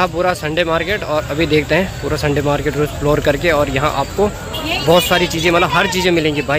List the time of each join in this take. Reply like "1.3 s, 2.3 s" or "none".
none